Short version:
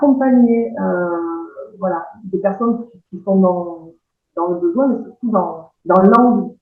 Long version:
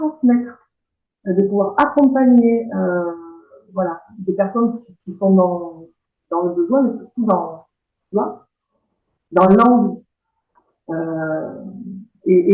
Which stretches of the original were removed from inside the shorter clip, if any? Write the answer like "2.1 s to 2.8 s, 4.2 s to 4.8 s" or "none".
7.6 s to 9.1 s